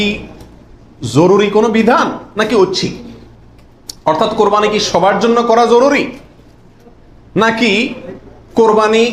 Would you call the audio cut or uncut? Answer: uncut